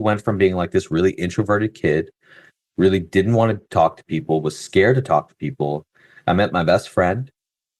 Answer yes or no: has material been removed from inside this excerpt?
no